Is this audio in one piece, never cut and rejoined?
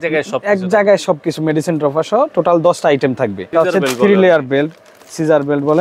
no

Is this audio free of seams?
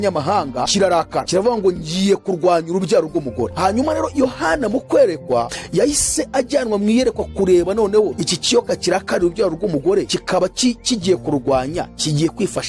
yes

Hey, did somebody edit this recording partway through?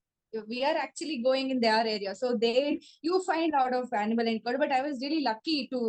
no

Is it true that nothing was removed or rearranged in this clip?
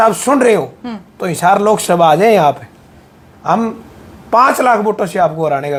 yes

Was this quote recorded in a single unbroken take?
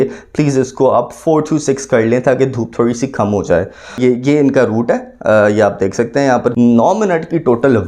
no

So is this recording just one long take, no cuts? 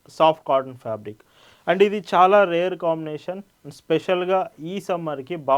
yes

